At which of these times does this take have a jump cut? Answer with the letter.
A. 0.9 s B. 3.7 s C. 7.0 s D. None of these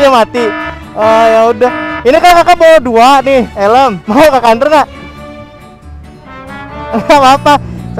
B